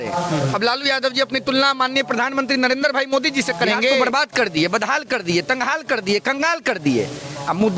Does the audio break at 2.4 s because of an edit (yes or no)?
no